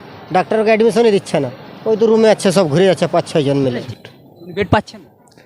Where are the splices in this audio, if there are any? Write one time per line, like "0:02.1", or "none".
0:03.8